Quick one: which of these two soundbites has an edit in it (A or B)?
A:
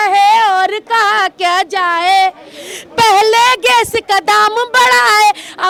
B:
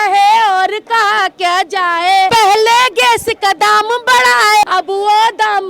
B